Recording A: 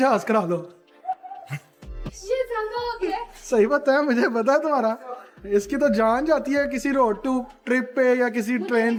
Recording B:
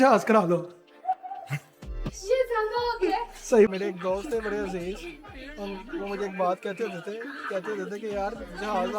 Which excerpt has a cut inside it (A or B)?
B